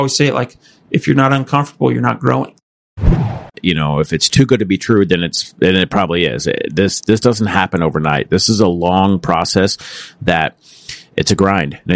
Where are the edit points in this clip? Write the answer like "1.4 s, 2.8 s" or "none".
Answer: 3.0 s